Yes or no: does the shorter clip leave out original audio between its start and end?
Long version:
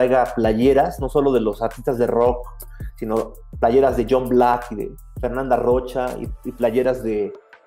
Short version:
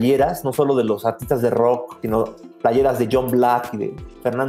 yes